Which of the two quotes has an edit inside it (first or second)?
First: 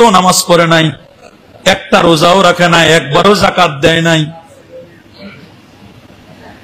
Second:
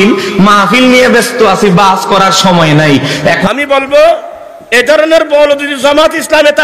second